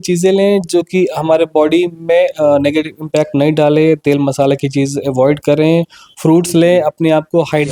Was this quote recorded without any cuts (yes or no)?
yes